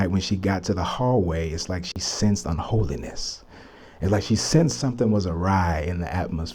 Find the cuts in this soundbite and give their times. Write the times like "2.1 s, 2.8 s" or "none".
none

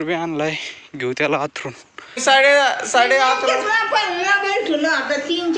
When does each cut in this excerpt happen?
2.2 s

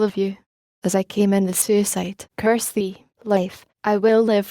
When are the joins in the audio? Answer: 1.4 s

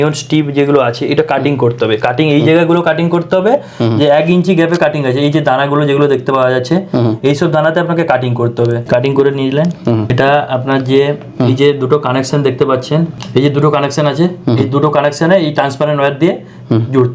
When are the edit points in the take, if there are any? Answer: 8.8 s, 10.1 s, 13.1 s

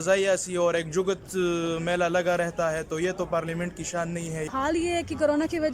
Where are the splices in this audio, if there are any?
4.5 s

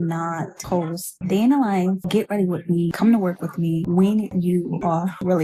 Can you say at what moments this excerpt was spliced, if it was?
none

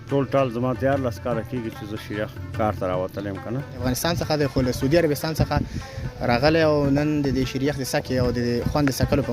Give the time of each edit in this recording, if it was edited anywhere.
3.8 s

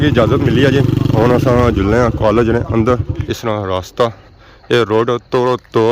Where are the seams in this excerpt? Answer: 3.1 s

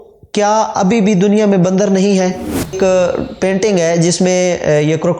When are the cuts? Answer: 2.8 s

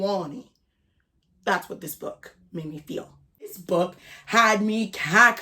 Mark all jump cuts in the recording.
3.5 s

